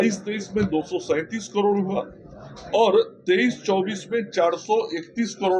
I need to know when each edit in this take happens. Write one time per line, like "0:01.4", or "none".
none